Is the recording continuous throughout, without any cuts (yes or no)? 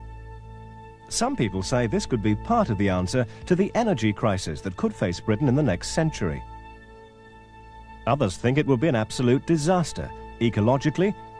no